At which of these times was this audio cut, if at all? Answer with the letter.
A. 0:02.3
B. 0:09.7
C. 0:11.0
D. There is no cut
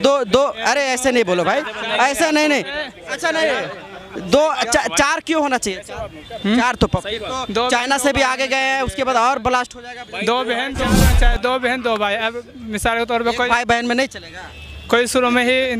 C